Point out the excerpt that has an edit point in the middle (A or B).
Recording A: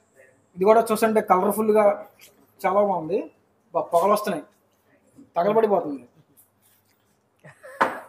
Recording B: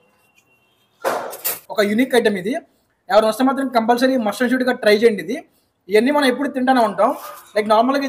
B